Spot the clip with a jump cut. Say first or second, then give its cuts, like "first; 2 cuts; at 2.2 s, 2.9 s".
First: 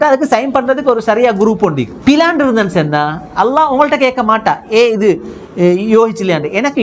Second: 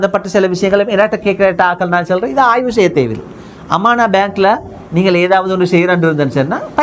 first; 1 cut; at 1.9 s